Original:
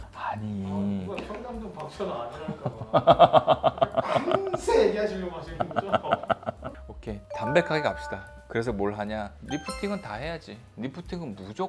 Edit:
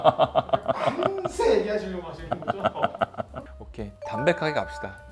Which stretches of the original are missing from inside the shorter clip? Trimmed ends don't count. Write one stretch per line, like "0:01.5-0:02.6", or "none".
none